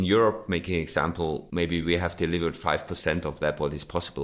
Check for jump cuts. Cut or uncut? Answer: cut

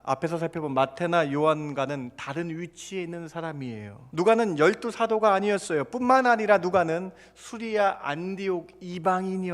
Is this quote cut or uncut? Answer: cut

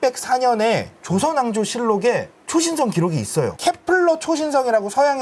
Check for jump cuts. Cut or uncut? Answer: uncut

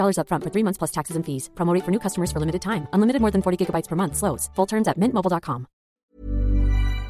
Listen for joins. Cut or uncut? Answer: cut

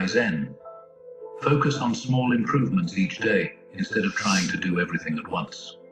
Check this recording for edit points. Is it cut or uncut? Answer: uncut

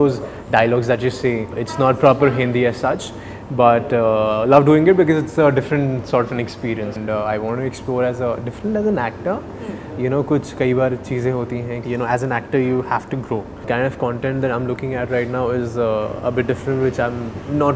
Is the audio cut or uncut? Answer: cut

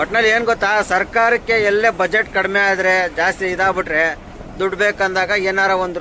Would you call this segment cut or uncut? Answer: uncut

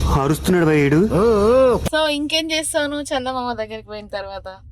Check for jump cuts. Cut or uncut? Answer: cut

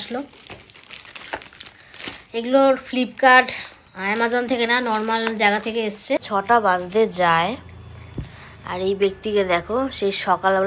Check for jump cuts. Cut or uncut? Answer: cut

